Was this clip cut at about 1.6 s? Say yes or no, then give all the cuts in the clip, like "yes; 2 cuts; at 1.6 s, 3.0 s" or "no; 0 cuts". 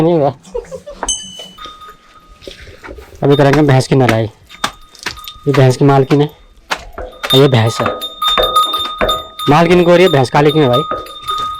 yes; 1 cut; at 1.6 s